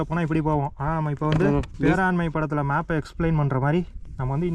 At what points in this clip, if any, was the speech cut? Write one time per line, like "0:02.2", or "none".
0:01.7